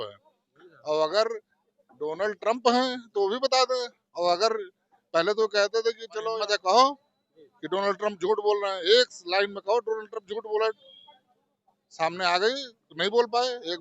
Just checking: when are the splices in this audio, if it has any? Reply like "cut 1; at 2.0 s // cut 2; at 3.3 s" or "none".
cut 1; at 6.3 s